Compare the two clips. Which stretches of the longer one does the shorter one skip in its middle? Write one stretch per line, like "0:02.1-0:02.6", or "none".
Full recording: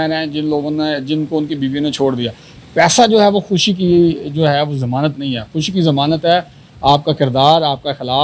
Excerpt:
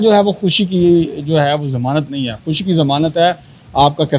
none